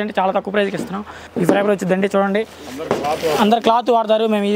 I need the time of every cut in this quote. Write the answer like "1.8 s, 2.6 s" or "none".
1.3 s